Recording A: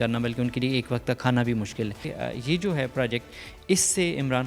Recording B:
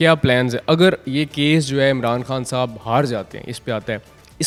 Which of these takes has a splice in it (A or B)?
A